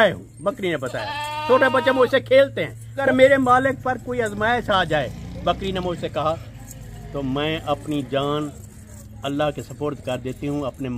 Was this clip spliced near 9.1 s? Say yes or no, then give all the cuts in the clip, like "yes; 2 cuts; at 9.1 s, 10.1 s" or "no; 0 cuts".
no; 1 cut; at 3.0 s